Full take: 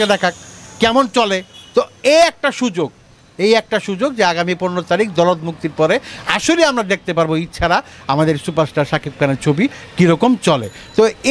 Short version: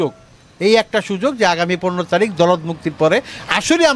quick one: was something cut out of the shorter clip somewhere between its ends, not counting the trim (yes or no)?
no